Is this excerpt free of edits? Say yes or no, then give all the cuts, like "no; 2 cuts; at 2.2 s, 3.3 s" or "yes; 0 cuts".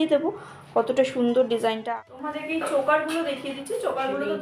no; 1 cut; at 1.8 s